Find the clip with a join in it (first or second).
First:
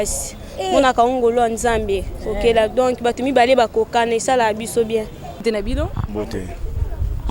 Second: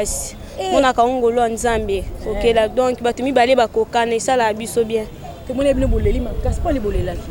first